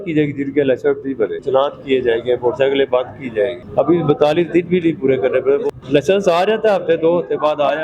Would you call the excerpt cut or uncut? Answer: cut